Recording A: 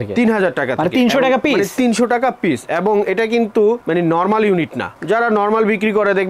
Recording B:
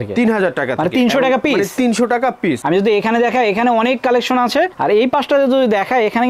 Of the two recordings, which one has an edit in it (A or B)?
B